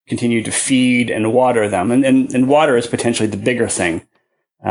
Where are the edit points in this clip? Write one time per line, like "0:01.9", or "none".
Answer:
none